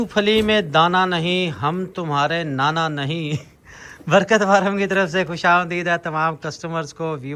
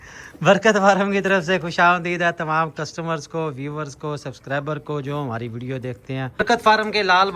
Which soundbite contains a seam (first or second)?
second